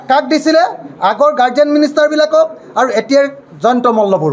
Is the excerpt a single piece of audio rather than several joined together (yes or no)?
yes